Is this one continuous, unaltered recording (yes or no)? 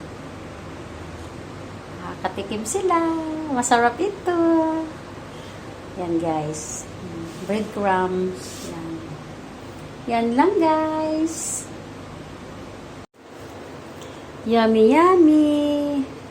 no